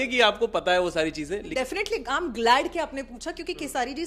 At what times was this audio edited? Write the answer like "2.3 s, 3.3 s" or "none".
1.5 s